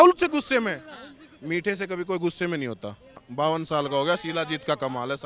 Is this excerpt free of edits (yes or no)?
no